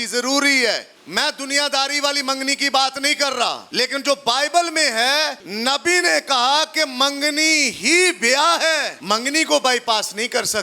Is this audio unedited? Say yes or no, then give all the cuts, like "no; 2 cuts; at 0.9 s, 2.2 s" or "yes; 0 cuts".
no; 4 cuts; at 1.0 s, 3.6 s, 5.4 s, 8.9 s